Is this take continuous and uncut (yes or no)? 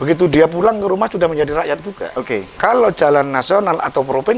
no